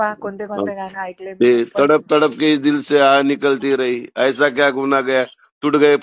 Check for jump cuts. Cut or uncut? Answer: uncut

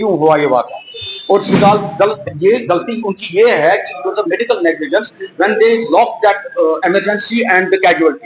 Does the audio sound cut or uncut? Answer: cut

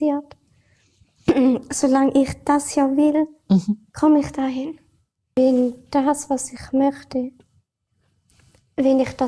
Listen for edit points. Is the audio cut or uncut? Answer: cut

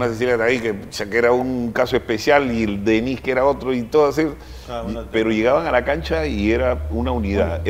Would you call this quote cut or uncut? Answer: uncut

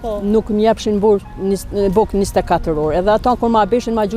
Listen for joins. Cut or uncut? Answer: uncut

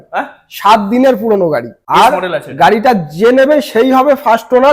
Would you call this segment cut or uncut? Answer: cut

